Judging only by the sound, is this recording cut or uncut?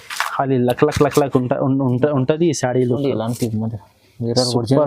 uncut